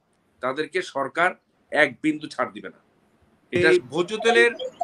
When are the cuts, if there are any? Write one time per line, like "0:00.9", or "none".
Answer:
0:03.6